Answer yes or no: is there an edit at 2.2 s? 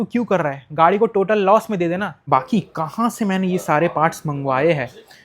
yes